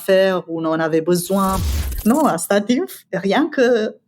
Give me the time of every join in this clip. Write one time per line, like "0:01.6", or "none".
0:01.6
0:03.0